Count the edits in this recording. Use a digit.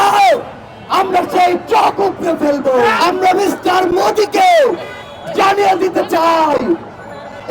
1